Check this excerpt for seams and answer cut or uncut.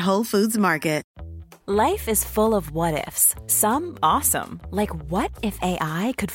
cut